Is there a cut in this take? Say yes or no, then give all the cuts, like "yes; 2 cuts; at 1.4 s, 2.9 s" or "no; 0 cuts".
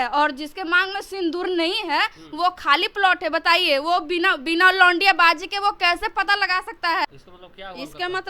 yes; 1 cut; at 7.1 s